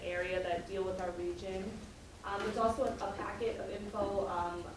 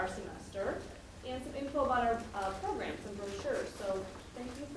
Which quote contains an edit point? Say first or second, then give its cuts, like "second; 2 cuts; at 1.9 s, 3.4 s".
first; 1 cut; at 2.5 s